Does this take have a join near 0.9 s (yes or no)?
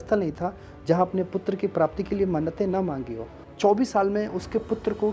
no